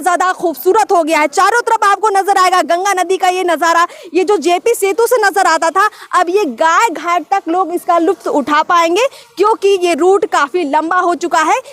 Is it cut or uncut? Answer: uncut